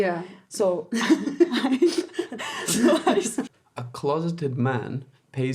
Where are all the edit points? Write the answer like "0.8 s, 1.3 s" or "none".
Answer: 3.4 s